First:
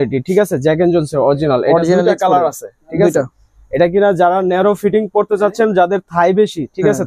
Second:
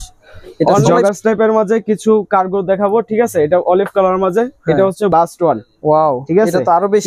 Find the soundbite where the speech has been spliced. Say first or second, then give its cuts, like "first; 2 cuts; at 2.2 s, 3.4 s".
second; 2 cuts; at 1.0 s, 5.1 s